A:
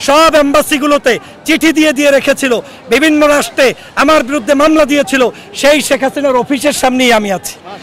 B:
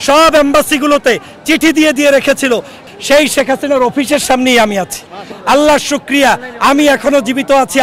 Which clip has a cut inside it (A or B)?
B